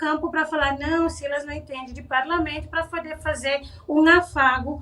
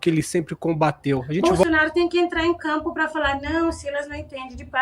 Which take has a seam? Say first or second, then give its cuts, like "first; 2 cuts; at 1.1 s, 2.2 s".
second; 1 cut; at 1.4 s